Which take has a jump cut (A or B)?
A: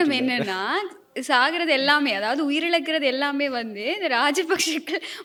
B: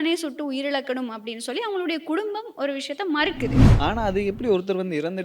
B